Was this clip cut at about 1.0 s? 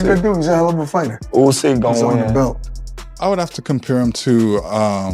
no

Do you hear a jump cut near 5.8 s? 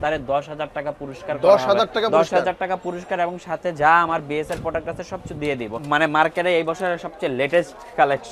yes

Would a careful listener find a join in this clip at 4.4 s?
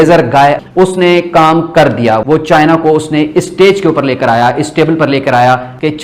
no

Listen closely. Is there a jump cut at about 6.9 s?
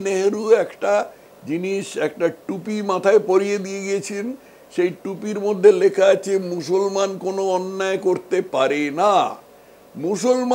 no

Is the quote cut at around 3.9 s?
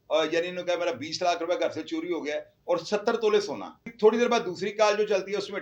yes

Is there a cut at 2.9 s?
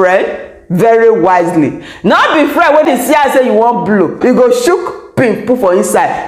yes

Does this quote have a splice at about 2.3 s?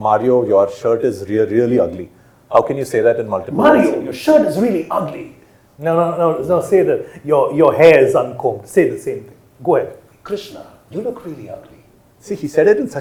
no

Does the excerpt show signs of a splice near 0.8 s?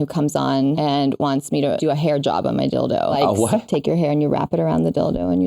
yes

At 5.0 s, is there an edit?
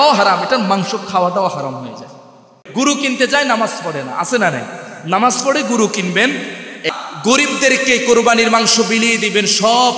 no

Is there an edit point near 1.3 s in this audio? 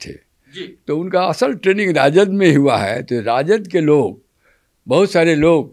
no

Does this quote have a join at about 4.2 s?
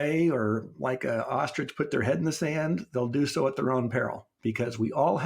yes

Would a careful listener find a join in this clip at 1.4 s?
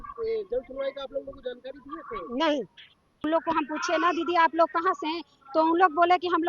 no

